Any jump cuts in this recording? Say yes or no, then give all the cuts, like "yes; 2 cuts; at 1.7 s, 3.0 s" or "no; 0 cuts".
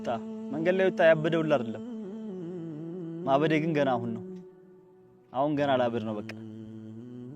yes; 2 cuts; at 1.7 s, 3.2 s